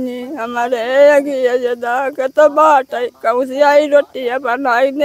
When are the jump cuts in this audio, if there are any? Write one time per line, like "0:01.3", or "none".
none